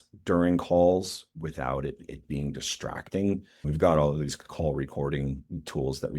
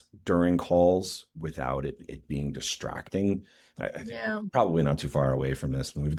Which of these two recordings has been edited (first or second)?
first